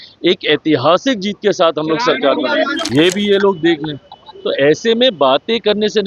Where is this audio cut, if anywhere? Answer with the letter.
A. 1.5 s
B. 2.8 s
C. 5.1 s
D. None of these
B